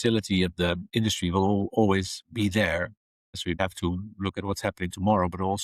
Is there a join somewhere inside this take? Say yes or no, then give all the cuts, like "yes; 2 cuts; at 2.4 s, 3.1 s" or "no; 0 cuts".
yes; 1 cut; at 3.6 s